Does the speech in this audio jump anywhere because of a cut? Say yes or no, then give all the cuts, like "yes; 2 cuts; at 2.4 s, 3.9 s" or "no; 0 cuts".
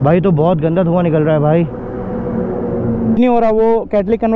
no; 0 cuts